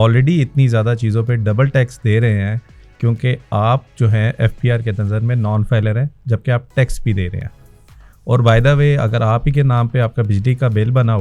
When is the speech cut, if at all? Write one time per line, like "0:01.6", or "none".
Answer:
none